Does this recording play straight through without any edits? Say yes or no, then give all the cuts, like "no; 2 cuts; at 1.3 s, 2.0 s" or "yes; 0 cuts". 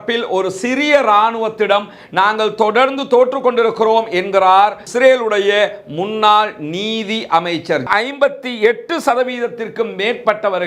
no; 1 cut; at 7.8 s